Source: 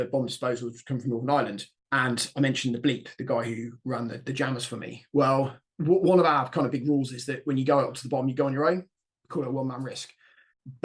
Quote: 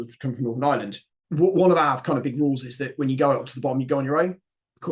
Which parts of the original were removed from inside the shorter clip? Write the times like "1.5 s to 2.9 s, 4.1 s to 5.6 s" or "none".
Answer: 1.8 s to 5.6 s